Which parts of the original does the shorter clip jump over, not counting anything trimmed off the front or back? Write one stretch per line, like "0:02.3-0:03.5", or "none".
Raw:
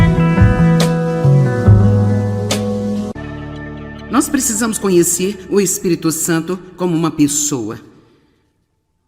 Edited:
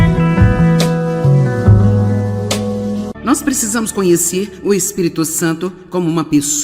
0:03.1-0:04.0